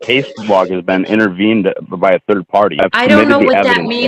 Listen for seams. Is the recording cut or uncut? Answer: cut